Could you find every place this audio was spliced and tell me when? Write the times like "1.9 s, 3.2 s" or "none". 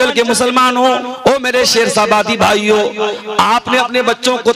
1.1 s